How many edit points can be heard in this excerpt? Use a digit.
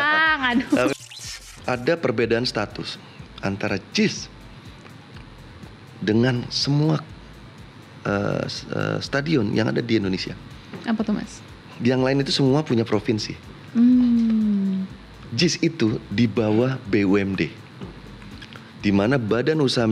1